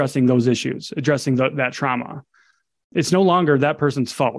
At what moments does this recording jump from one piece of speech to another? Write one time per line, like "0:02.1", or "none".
none